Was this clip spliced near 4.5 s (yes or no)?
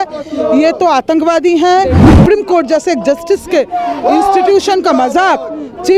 no